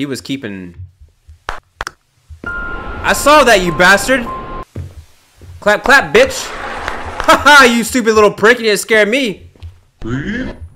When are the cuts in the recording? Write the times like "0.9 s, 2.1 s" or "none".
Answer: 4.6 s